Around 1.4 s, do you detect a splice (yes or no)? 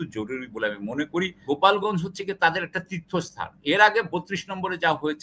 yes